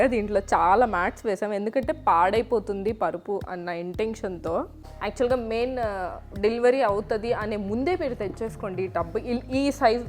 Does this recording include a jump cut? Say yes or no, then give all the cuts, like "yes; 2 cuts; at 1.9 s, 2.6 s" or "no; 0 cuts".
yes; 1 cut; at 4.8 s